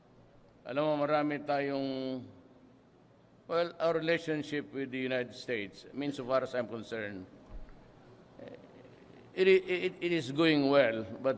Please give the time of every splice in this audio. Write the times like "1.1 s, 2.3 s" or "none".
7.1 s